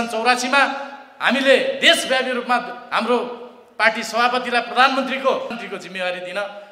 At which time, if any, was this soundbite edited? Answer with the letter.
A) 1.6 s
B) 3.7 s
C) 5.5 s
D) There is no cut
C